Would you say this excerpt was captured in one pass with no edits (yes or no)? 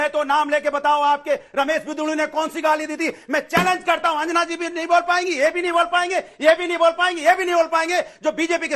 yes